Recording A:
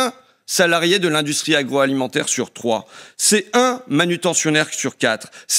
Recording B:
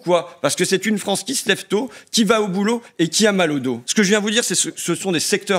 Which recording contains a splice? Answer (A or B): B